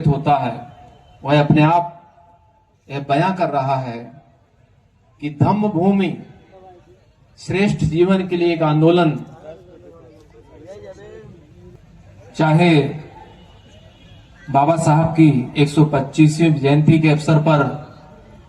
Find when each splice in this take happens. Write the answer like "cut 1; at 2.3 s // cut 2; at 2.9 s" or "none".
cut 1; at 11.7 s

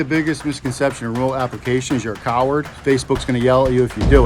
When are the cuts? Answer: cut 1; at 2.7 s

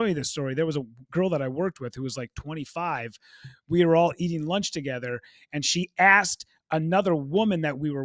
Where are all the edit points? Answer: none

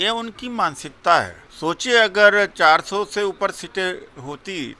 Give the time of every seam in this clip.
cut 1; at 1.4 s

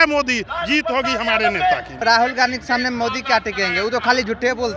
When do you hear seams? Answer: cut 1; at 1.9 s

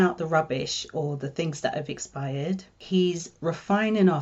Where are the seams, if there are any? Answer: cut 1; at 2.7 s

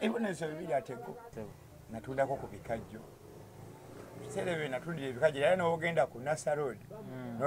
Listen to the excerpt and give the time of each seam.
cut 1; at 1.3 s

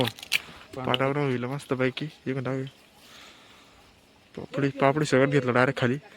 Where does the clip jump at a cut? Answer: none

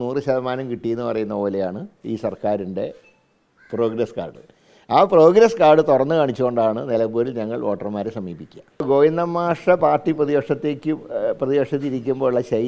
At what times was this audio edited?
cut 1; at 8.8 s

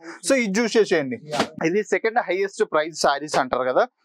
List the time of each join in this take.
cut 1; at 1.6 s

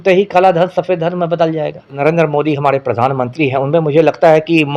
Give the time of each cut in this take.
cut 1; at 2.0 s

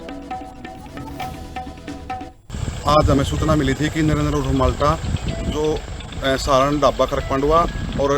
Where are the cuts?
cut 1; at 2.3 s

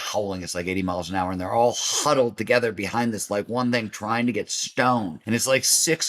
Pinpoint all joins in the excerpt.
cut 1; at 5.2 s

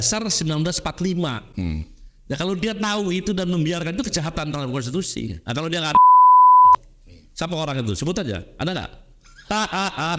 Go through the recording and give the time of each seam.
none

